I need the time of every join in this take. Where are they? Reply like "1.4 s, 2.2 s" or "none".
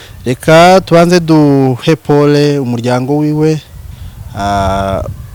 none